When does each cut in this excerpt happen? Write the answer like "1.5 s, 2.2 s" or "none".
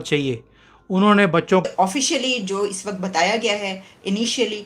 1.6 s